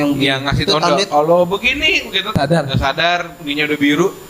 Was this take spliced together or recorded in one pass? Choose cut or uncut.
cut